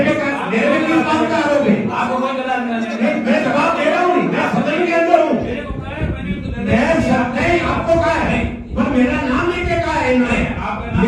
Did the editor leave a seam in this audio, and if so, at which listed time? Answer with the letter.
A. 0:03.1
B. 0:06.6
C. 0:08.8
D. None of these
D